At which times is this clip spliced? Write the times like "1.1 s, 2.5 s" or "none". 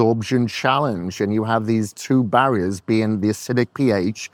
none